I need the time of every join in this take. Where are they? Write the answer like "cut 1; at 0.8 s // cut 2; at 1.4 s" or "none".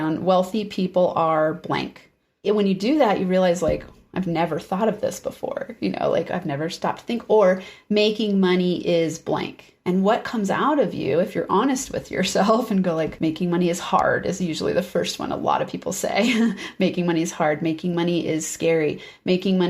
cut 1; at 2.4 s